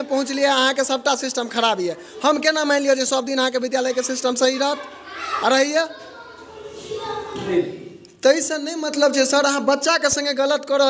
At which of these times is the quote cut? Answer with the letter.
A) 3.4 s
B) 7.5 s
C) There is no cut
B